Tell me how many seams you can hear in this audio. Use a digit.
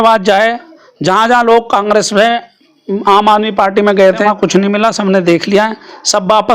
1